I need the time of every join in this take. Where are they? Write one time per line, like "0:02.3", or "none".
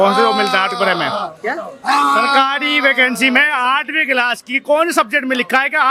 none